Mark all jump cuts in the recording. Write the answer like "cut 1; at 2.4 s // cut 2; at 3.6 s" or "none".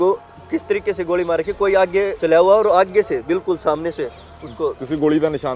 cut 1; at 2.2 s